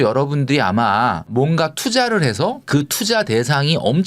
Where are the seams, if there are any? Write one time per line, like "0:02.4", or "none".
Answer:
0:01.3